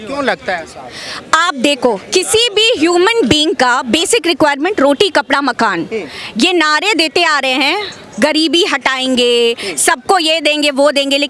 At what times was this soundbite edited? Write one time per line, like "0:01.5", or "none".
none